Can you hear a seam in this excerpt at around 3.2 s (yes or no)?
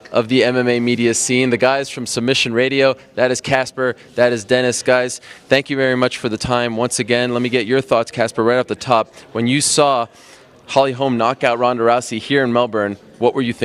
yes